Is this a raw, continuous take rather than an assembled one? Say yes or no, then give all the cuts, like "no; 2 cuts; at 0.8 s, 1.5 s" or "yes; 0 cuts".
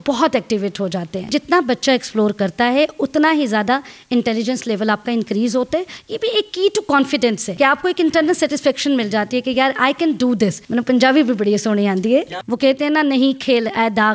no; 5 cuts; at 1.3 s, 6.0 s, 7.5 s, 10.6 s, 12.4 s